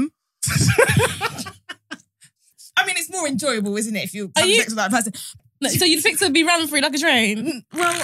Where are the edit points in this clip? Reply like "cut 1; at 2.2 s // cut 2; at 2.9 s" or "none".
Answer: cut 1; at 2.6 s // cut 2; at 5.3 s